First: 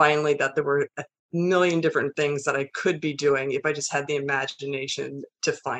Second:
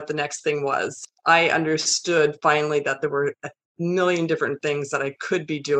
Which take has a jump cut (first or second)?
second